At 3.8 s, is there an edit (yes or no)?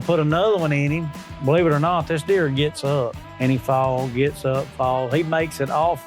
no